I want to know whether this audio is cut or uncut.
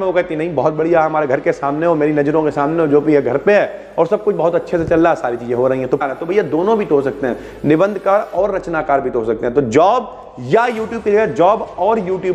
cut